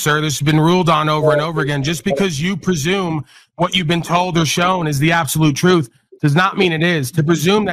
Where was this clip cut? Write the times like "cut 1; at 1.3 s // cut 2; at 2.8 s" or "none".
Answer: none